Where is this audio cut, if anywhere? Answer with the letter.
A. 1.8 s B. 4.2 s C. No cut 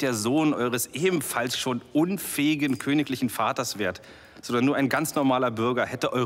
C